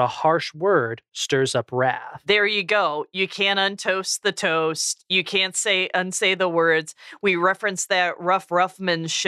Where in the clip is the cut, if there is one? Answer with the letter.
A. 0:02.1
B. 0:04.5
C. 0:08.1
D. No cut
A